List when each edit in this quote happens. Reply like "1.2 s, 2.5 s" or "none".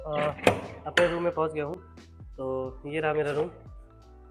none